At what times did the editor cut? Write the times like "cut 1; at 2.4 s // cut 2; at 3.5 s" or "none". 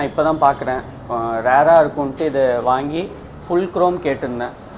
none